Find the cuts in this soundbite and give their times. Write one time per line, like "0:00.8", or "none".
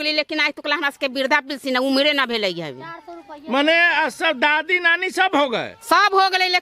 none